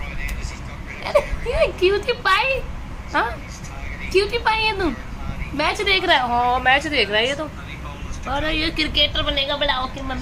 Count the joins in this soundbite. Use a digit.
0